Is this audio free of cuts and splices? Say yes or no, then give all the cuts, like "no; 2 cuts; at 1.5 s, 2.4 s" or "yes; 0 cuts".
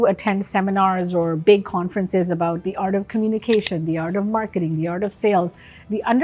yes; 0 cuts